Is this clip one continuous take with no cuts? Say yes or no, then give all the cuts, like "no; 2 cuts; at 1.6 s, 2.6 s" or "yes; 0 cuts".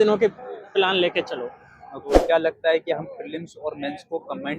no; 1 cut; at 2.0 s